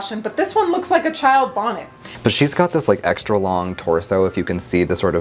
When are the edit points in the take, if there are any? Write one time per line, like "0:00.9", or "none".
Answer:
0:02.0